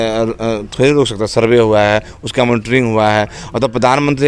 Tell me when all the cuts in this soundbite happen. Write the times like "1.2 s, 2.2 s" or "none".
none